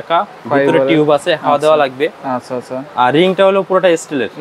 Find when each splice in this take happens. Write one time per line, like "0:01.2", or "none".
none